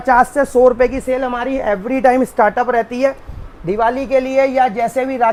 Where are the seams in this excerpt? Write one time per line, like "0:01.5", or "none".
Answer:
none